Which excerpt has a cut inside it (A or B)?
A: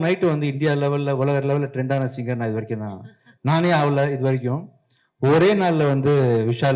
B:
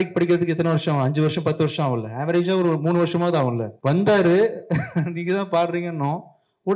B